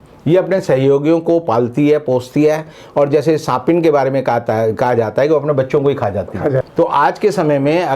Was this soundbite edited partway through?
yes; 1 cut; at 6.7 s

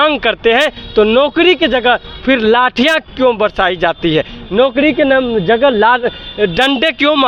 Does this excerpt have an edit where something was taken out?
no; 0 cuts

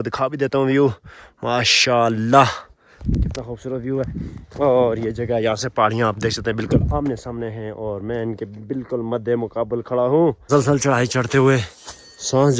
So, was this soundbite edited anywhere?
yes; 1 cut; at 10.5 s

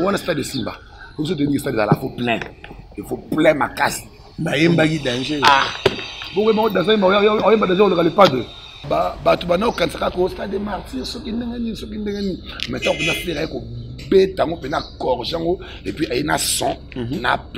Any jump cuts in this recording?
yes; 1 cut; at 8.8 s

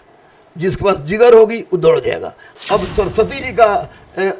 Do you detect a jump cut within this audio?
yes; 1 cut; at 2.6 s

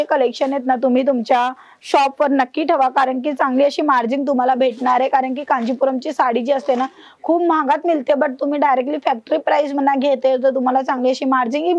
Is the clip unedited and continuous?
yes; 0 cuts

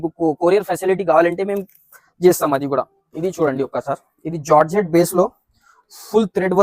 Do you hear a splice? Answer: yes; 1 cut; at 3.0 s

